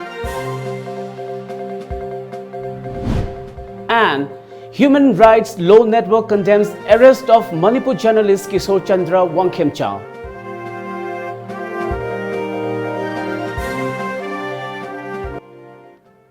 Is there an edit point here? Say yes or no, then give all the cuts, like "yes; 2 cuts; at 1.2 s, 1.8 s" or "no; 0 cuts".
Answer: yes; 1 cut; at 15.4 s